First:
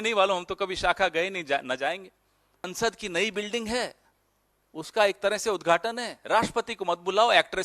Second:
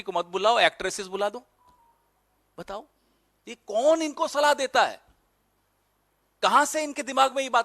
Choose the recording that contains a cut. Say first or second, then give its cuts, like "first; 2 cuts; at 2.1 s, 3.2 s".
first; 1 cut; at 2.7 s